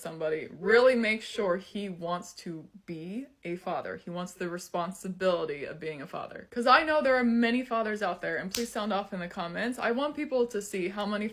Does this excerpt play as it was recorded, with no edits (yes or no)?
yes